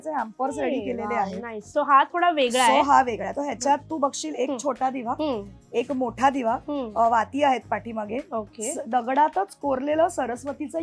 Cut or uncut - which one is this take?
uncut